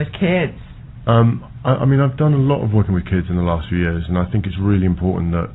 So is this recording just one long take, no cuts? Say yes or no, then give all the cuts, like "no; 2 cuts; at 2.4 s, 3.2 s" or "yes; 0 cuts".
yes; 0 cuts